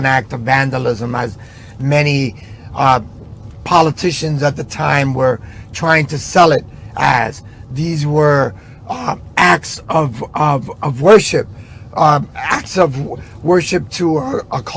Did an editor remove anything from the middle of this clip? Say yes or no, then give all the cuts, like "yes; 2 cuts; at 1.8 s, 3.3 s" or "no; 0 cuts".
no; 0 cuts